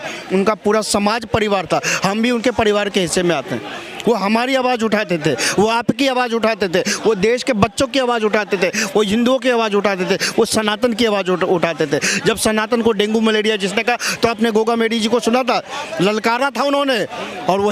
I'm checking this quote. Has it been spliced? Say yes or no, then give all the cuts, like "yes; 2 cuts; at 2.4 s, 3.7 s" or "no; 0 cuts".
no; 0 cuts